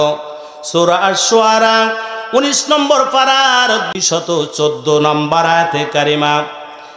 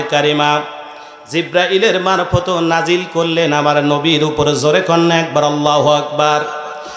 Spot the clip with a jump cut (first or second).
first